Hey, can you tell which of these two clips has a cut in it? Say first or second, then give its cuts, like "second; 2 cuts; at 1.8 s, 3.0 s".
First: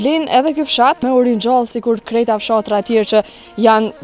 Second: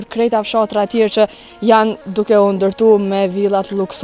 first; 1 cut; at 1.0 s